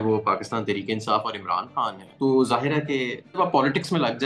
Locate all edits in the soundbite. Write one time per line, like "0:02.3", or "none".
0:03.4